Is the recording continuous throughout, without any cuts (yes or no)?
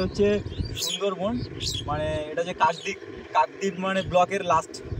yes